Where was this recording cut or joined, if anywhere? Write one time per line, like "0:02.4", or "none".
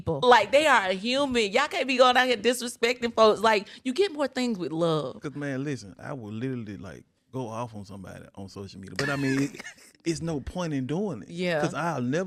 none